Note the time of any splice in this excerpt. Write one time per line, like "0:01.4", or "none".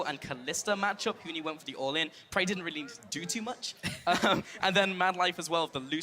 0:04.7